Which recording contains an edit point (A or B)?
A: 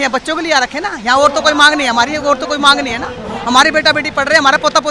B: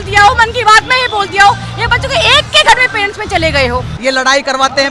B